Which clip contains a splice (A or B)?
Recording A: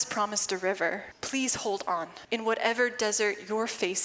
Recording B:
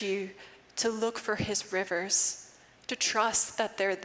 A